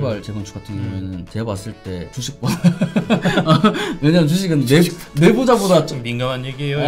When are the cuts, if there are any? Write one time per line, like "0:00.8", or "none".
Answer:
0:01.3
0:02.2